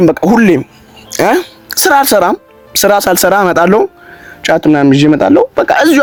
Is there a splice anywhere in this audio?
no; 0 cuts

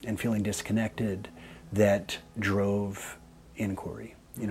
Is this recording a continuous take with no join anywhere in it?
yes; 0 cuts

